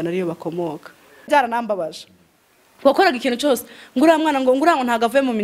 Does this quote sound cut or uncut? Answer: cut